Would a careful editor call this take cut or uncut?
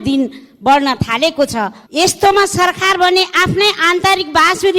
cut